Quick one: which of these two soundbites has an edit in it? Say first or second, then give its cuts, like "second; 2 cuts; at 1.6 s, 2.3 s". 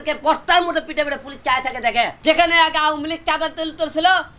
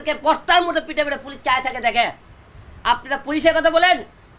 first; 1 cut; at 2.1 s